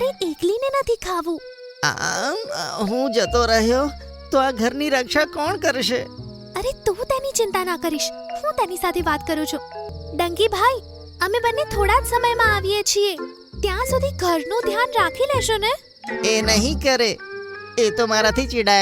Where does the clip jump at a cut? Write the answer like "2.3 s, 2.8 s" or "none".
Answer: 9.9 s